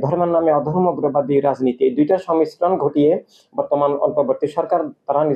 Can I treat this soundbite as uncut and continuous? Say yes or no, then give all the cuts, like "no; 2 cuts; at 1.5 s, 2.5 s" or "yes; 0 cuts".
yes; 0 cuts